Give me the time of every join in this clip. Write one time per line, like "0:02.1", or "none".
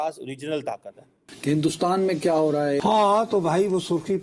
0:01.2